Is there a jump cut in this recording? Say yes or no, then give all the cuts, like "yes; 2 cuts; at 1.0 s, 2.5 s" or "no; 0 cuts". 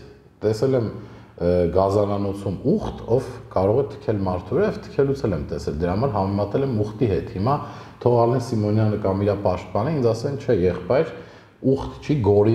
no; 0 cuts